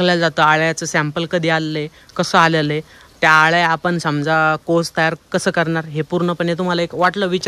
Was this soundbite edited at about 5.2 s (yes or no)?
no